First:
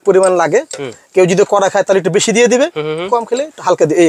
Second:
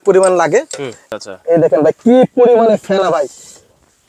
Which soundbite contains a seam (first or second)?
second